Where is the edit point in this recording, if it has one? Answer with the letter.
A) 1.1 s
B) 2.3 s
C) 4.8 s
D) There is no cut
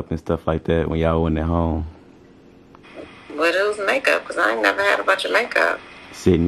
B